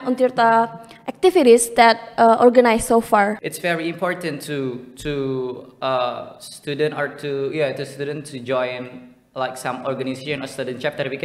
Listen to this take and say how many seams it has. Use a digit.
1